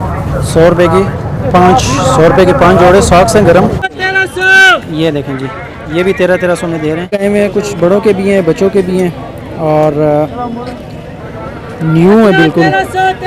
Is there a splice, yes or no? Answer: yes